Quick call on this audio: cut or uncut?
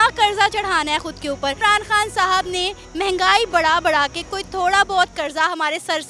cut